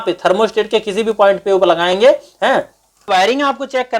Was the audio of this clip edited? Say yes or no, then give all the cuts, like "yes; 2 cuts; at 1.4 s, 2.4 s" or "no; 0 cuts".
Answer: yes; 1 cut; at 3.0 s